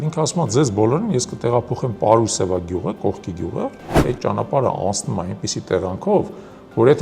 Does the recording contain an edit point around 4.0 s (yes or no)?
yes